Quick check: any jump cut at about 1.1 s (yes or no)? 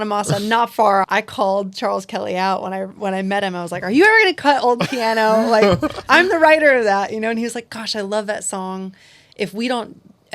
yes